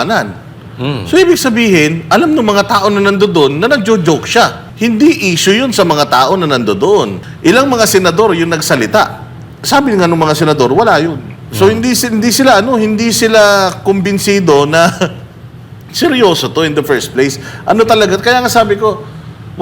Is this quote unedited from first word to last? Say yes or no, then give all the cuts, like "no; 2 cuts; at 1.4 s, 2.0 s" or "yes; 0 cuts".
no; 2 cuts; at 4.6 s, 7.2 s